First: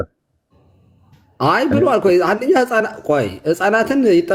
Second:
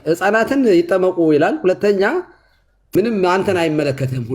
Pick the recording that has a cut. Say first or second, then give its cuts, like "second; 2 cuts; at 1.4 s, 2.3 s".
second; 1 cut; at 3.0 s